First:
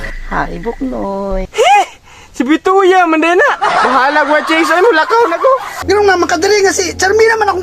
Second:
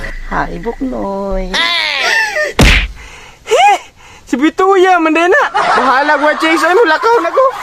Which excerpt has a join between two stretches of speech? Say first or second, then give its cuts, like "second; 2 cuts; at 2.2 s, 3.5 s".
first; 2 cuts; at 1.5 s, 5.7 s